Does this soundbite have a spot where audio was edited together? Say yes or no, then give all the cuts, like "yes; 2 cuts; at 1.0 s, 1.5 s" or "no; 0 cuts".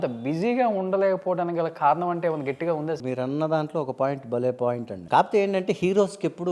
yes; 2 cuts; at 3.0 s, 4.9 s